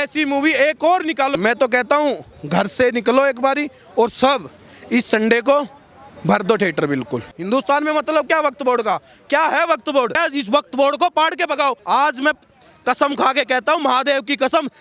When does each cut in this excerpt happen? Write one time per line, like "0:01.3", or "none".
0:01.4
0:07.4
0:10.2
0:11.8